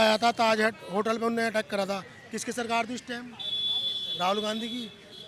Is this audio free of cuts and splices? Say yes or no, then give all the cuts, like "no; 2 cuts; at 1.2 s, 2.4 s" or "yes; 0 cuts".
yes; 0 cuts